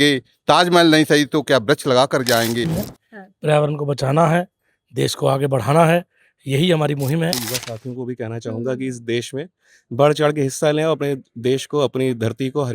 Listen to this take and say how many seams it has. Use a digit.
2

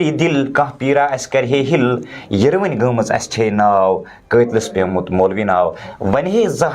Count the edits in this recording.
1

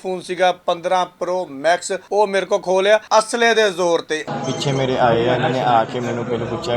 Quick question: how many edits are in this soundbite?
3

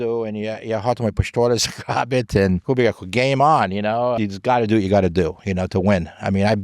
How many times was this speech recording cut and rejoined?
2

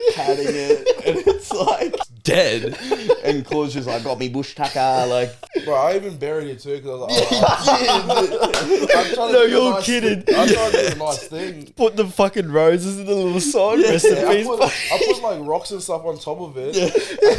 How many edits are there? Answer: 2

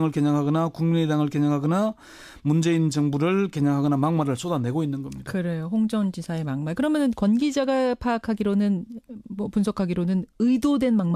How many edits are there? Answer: 1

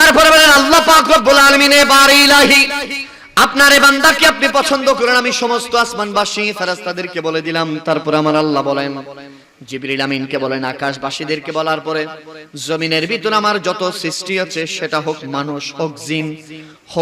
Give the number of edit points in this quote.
0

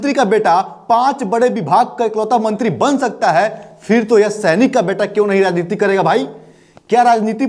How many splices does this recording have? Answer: 0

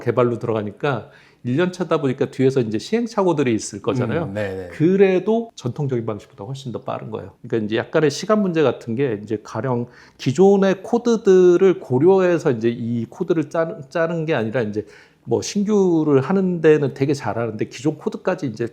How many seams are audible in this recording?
1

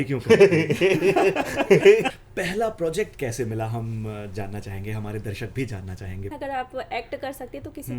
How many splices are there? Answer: 2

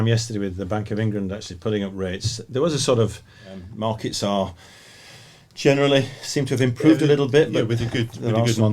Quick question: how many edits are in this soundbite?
1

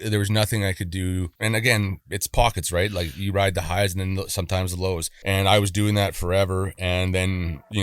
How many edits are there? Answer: 2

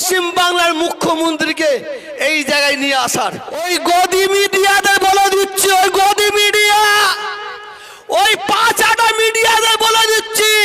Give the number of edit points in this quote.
1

